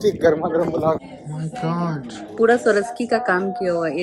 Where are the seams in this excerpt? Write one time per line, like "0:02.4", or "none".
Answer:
0:01.0